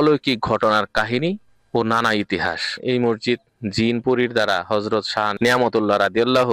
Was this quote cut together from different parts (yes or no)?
yes